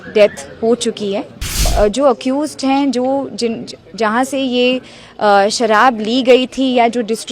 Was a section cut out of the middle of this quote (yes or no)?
yes